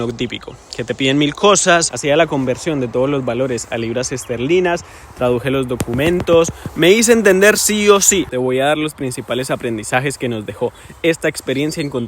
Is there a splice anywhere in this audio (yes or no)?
yes